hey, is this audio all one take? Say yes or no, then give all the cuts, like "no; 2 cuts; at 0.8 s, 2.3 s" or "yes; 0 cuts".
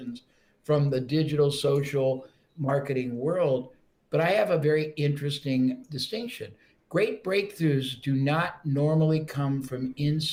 yes; 0 cuts